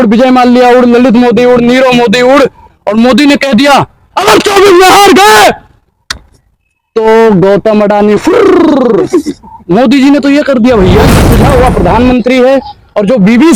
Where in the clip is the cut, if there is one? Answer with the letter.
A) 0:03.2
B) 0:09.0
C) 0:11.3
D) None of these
C